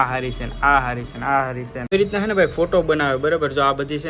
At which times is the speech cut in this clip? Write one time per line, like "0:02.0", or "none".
0:01.7